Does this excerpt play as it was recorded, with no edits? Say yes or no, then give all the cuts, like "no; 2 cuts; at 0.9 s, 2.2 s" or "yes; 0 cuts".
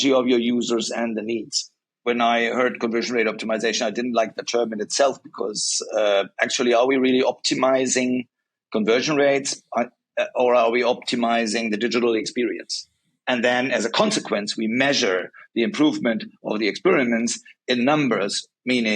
no; 1 cut; at 2.0 s